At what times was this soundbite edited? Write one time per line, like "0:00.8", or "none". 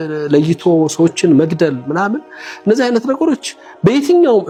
none